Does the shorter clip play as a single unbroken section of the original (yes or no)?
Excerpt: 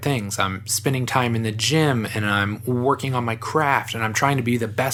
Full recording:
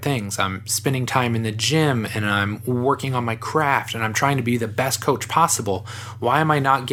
yes